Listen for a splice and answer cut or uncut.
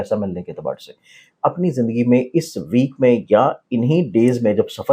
cut